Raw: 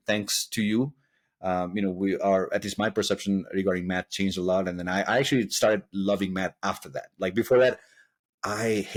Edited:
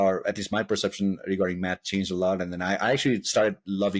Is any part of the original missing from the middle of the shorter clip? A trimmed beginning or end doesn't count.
no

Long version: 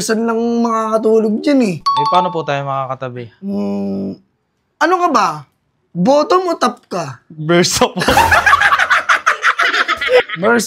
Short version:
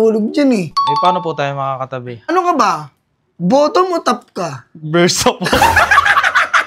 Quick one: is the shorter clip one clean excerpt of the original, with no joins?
no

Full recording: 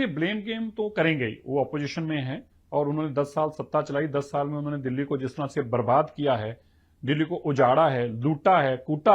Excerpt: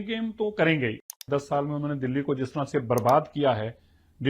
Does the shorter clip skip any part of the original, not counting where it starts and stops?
yes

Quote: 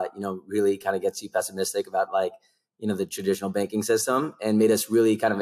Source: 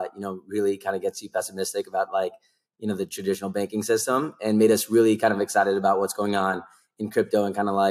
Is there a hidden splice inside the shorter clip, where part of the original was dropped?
no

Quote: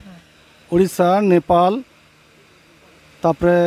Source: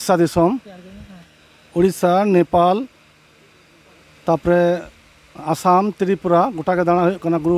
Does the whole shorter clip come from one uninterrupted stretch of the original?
yes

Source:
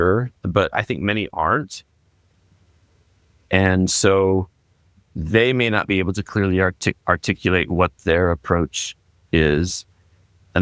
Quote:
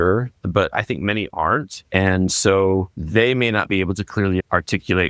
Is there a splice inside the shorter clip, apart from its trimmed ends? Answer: yes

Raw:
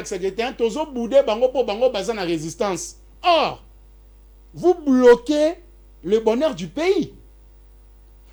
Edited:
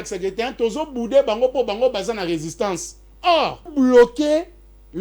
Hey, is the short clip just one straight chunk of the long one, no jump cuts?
no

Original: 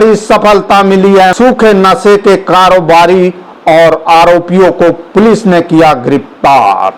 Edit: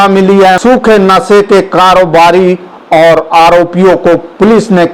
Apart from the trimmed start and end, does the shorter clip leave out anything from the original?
no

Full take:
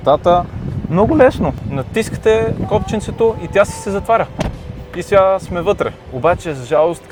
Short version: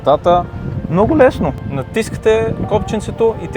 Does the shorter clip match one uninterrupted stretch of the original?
yes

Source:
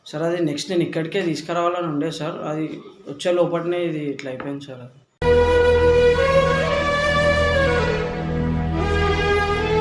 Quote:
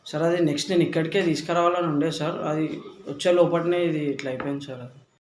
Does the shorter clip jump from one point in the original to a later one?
no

